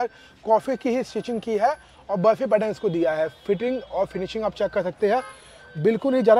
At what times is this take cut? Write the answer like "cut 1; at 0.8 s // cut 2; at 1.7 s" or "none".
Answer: none